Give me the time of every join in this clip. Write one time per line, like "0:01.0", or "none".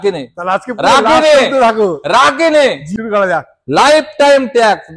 0:02.8